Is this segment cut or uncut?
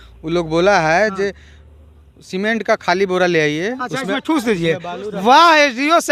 uncut